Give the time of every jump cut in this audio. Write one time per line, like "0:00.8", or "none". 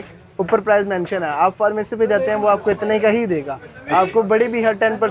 none